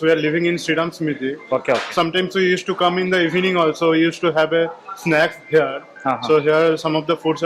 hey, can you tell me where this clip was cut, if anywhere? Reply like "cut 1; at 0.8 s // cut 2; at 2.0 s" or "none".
none